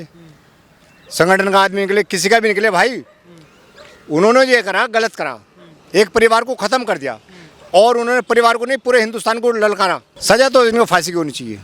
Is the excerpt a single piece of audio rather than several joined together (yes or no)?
no